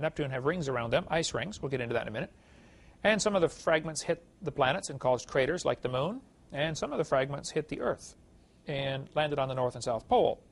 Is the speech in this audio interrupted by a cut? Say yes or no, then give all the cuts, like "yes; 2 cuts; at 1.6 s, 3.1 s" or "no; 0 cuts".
yes; 1 cut; at 1.1 s